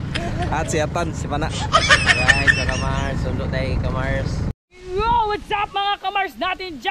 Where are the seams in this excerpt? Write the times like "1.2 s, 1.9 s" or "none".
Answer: 4.5 s